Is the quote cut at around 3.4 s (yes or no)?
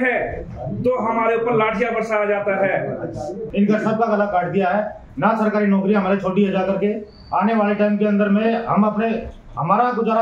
yes